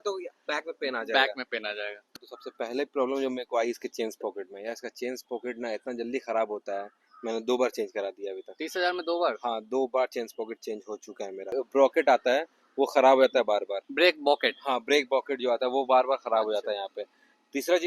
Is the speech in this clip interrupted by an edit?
yes; 2 cuts; at 2.1 s, 11.5 s

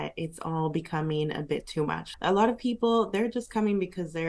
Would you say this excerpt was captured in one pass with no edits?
no; 1 cut; at 2.0 s

